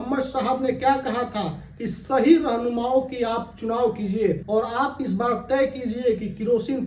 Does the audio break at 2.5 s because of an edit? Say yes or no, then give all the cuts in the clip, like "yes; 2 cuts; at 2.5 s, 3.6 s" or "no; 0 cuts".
no; 1 cut; at 4.4 s